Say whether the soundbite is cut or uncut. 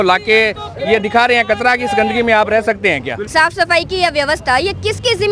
cut